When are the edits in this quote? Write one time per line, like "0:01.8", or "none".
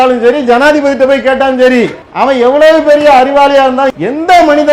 0:02.0
0:03.9

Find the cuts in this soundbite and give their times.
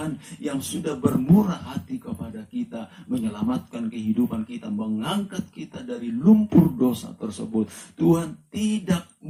none

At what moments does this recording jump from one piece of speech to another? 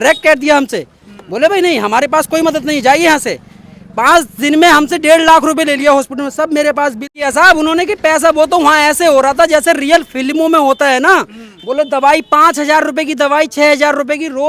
0:07.1

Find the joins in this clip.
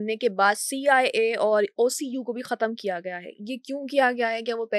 none

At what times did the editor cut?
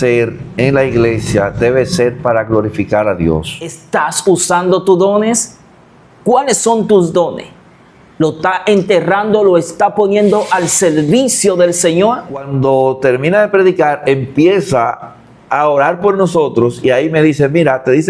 0:03.8
0:12.5

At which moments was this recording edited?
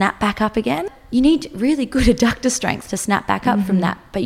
0:01.0

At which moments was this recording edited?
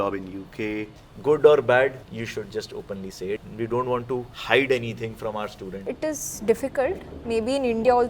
0:01.0
0:02.0
0:03.4
0:04.3
0:05.9

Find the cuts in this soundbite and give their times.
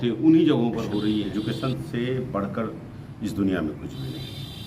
0:01.3

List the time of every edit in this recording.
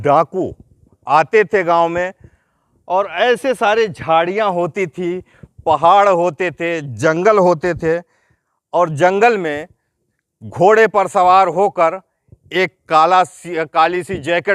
none

